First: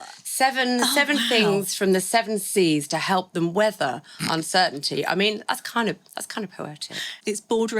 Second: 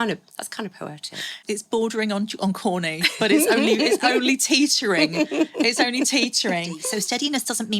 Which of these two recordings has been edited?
second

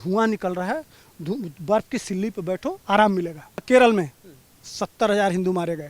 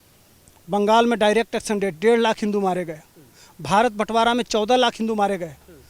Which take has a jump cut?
first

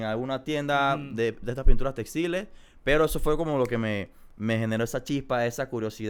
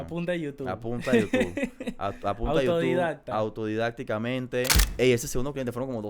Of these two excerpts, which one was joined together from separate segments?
second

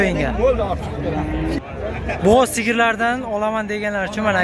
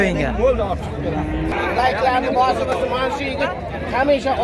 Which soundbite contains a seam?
second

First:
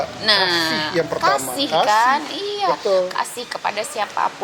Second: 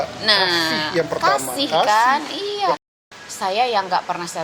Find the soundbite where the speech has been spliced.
second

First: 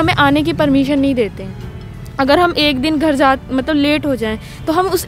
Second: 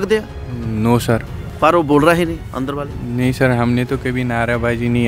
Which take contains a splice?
second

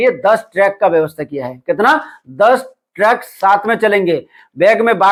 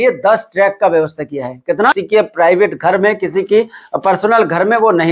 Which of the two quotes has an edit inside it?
second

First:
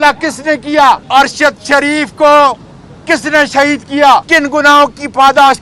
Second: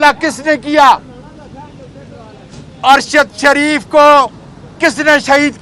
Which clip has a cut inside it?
first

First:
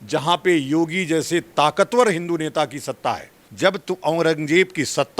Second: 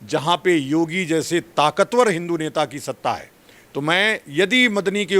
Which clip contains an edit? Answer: first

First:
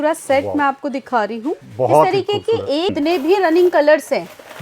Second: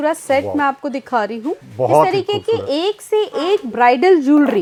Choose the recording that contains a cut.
first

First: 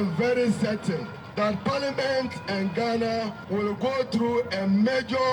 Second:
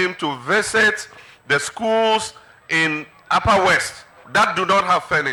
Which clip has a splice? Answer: first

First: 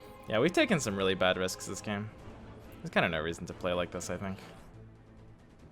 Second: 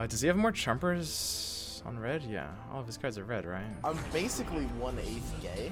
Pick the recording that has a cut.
first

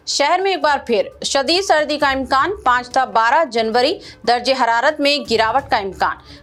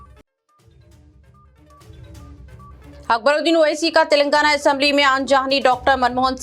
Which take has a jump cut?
second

